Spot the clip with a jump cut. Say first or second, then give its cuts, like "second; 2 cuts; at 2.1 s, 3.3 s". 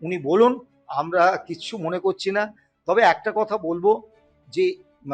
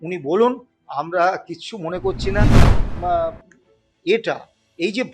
second; 1 cut; at 2.7 s